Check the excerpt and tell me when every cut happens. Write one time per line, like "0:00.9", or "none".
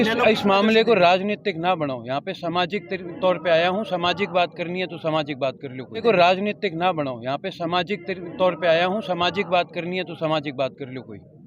0:06.0